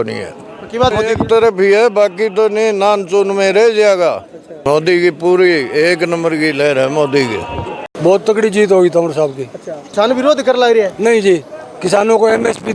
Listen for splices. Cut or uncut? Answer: cut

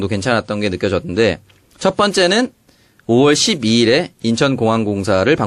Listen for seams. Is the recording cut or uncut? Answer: cut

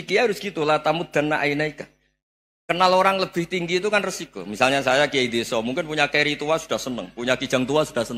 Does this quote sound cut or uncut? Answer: uncut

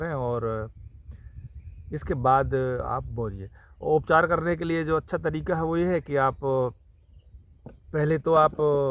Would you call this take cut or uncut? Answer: uncut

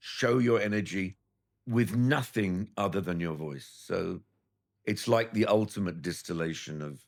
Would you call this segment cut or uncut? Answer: uncut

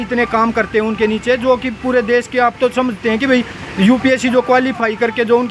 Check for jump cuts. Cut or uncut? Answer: uncut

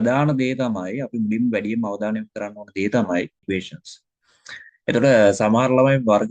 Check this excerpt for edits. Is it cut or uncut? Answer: cut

